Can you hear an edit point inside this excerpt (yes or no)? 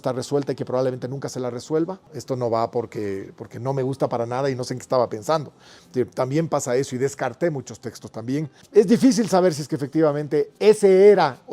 yes